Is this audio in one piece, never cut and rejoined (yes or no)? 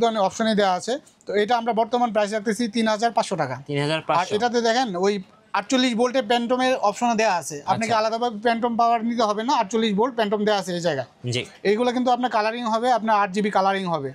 yes